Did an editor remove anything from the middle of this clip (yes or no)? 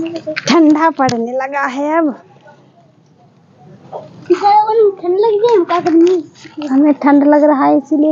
no